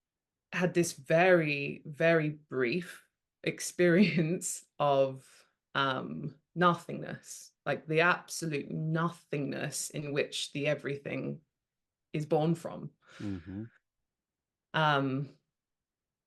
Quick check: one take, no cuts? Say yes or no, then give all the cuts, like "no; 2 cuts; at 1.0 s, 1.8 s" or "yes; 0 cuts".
yes; 0 cuts